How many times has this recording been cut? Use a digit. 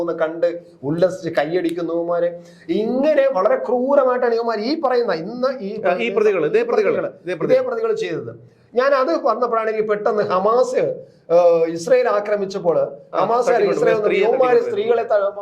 0